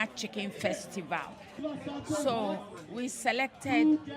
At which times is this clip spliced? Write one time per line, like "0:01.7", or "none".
0:01.6